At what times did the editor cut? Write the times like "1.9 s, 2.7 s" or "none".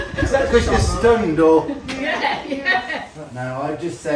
3.2 s